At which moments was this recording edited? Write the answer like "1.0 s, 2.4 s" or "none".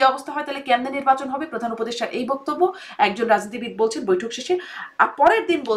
none